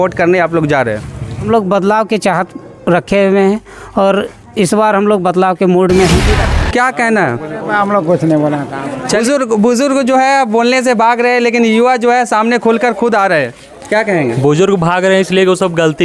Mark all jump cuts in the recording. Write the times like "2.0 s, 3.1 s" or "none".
1.5 s, 6.4 s, 9.2 s

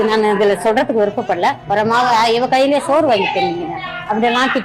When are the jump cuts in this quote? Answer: 1.6 s

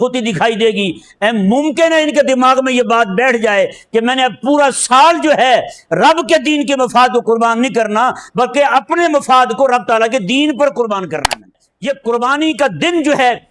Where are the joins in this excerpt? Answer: 11.7 s

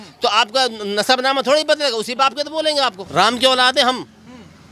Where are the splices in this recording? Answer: 3.0 s

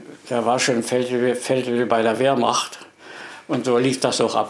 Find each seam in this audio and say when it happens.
none

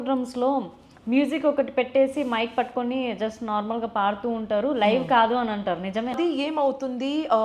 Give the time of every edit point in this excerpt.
6.2 s

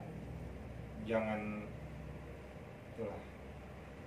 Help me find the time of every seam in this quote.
none

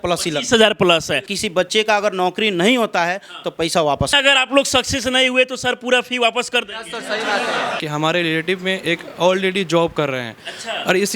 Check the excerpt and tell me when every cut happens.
1.3 s, 4.2 s, 7.8 s

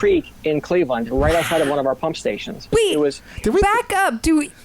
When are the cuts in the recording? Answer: 2.7 s

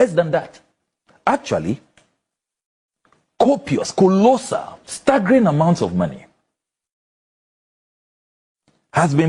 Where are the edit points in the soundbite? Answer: none

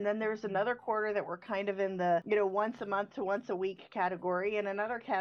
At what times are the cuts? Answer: 2.2 s

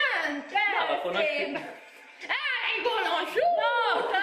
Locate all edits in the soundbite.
none

